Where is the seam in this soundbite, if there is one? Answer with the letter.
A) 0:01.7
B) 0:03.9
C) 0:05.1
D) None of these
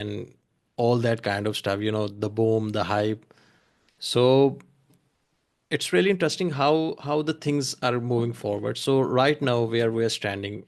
D